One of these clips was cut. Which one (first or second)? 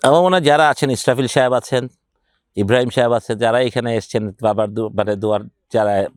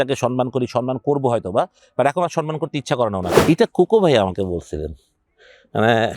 second